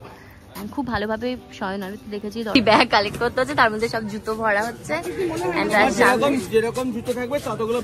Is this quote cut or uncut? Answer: cut